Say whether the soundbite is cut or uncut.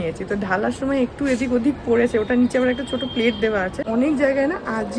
cut